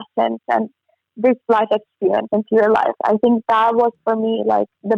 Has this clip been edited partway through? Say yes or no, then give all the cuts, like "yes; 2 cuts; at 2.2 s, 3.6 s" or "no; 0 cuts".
no; 0 cuts